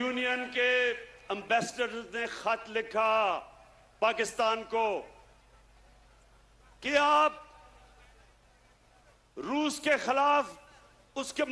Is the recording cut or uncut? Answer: uncut